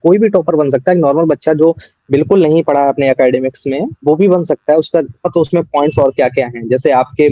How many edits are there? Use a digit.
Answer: 1